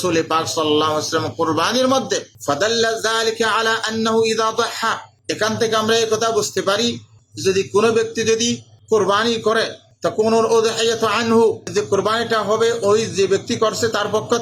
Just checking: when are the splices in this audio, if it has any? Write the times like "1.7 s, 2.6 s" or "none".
11.7 s